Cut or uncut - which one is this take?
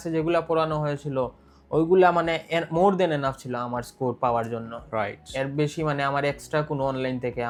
uncut